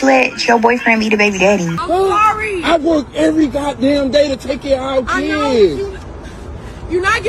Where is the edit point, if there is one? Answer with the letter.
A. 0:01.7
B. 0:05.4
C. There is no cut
A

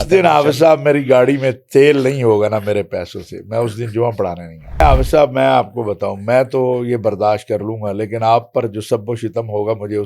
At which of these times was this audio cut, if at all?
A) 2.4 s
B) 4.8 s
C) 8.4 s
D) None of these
B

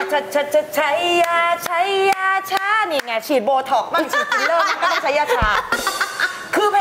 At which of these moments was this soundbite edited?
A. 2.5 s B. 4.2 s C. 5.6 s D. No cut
D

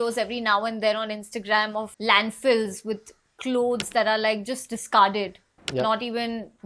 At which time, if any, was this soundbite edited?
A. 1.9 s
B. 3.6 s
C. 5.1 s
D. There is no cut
A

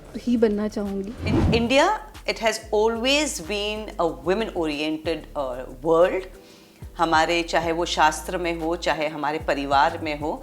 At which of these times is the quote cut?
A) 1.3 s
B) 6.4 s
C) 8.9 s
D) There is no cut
A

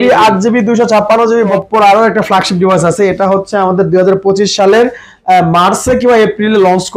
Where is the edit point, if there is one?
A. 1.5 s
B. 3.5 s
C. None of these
A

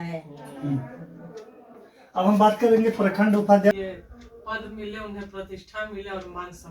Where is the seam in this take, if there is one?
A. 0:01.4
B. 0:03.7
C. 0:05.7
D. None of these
B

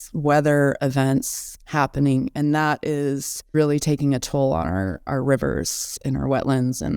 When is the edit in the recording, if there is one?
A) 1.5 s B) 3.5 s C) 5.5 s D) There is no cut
B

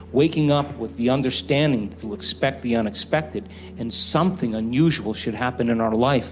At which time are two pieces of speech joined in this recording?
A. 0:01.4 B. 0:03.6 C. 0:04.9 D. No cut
D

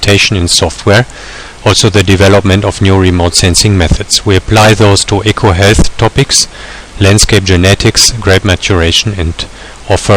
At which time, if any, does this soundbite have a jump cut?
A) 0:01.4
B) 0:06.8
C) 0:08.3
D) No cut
C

